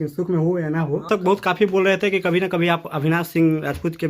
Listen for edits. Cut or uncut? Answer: cut